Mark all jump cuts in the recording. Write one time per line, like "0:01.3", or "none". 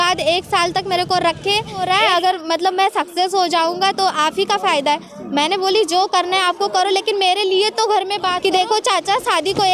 0:01.8
0:08.4